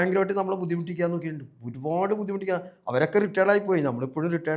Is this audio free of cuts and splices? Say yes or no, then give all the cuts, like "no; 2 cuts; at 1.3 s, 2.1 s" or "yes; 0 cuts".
yes; 0 cuts